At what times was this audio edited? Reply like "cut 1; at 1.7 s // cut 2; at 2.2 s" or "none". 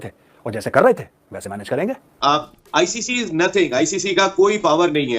cut 1; at 2.1 s